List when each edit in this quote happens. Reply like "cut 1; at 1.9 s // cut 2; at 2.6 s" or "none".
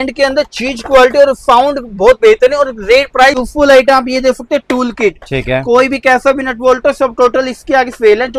cut 1; at 3.4 s